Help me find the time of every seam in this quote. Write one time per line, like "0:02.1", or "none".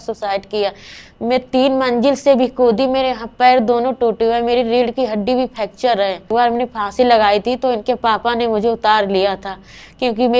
0:06.3